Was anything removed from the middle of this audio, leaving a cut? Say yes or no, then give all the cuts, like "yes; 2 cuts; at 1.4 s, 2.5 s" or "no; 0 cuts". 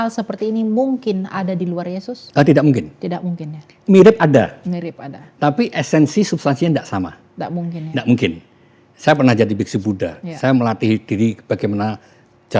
yes; 2 cuts; at 2.2 s, 3.7 s